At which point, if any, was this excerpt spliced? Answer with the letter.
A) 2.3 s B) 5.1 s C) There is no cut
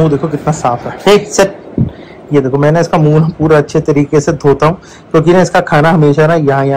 C